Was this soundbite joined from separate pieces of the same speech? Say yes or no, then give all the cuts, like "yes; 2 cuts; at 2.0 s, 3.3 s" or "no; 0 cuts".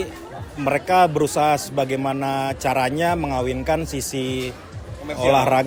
no; 0 cuts